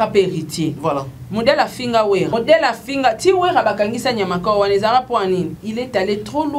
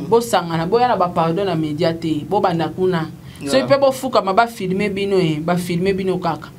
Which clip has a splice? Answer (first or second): first